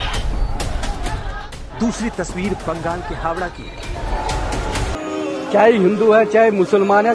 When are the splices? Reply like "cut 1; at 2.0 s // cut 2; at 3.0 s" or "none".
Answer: cut 1; at 5.0 s